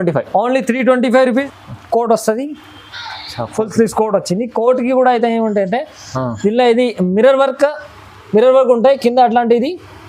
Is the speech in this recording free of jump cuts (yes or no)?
no